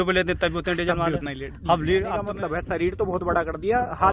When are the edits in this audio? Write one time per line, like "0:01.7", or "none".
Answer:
0:02.2